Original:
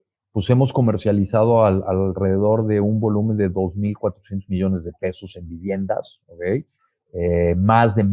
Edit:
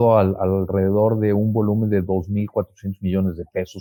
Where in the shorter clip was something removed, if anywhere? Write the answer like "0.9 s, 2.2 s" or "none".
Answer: none